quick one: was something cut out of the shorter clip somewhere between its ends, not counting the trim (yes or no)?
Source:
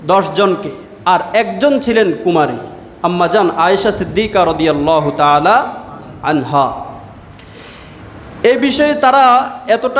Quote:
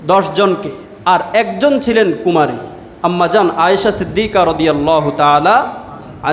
no